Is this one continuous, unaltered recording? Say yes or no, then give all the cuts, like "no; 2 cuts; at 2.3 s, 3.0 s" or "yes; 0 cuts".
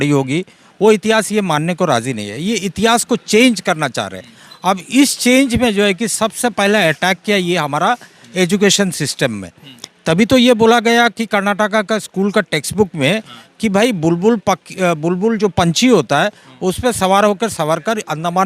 yes; 0 cuts